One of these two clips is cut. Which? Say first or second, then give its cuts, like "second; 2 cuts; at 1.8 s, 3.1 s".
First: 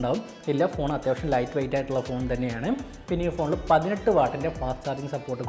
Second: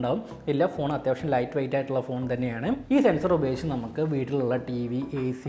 second; 1 cut; at 2.8 s